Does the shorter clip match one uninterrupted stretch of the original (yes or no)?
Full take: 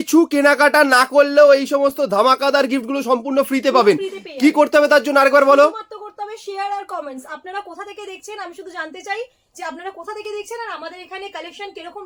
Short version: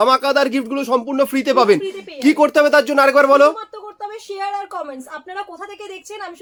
yes